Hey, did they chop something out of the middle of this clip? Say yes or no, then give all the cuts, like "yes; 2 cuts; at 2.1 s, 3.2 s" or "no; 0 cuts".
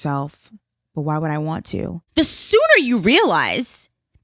yes; 1 cut; at 2.0 s